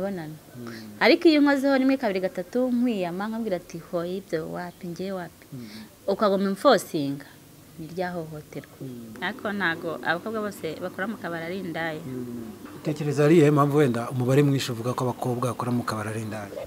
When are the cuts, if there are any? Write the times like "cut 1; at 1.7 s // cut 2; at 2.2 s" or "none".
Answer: cut 1; at 9.1 s // cut 2; at 12.7 s